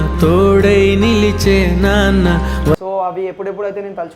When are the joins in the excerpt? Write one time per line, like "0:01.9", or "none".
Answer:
0:02.8